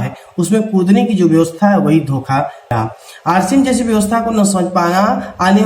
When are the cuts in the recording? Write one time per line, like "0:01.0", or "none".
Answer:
0:02.7